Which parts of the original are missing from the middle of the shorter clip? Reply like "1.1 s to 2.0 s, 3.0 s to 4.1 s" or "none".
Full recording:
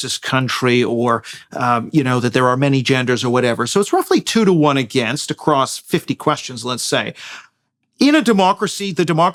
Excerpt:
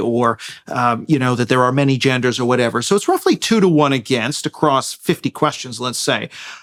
none